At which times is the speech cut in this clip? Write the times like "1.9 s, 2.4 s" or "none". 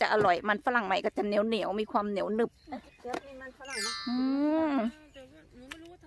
none